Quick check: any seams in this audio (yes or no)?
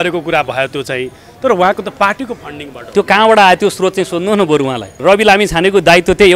yes